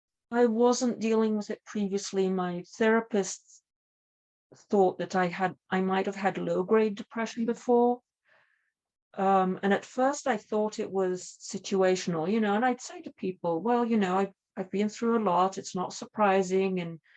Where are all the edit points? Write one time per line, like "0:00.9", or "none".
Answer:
none

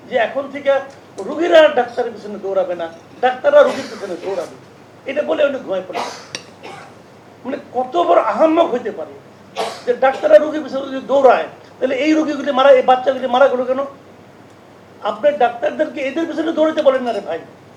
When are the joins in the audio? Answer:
none

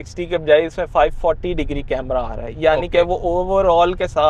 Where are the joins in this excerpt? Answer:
none

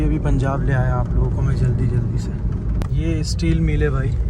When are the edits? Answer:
0:02.8

